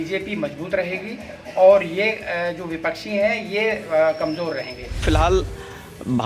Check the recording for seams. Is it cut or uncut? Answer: cut